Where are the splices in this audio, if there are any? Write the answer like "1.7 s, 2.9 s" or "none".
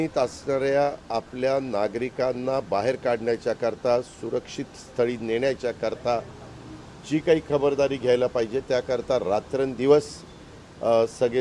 none